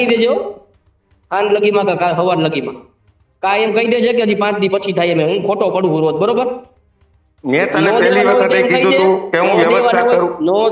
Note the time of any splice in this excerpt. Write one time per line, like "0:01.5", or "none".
none